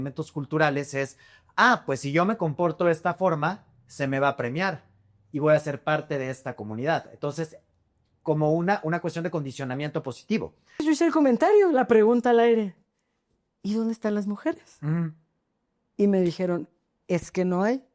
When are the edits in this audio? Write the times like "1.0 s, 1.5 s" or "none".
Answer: 10.8 s